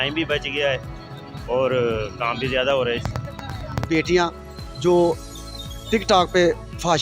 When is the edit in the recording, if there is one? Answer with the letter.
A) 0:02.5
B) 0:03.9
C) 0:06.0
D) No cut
B